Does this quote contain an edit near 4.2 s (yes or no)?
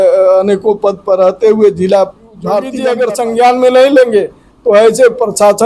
no